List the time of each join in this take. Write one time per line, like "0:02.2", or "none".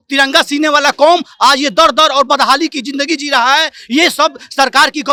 none